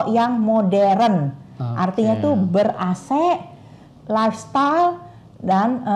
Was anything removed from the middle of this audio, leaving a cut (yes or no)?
no